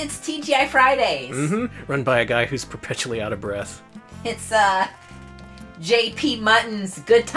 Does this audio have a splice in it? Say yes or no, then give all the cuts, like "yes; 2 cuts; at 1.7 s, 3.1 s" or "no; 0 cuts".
yes; 1 cut; at 1.8 s